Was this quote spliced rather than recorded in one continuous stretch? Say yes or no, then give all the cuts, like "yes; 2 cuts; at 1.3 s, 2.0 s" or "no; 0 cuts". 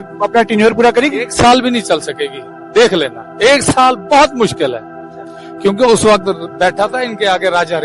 no; 0 cuts